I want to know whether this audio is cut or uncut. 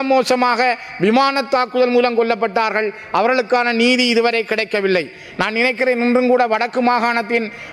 uncut